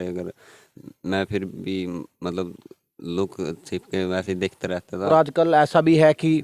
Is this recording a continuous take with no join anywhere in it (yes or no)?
no